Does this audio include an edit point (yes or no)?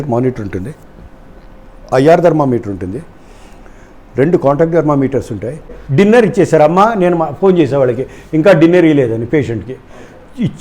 yes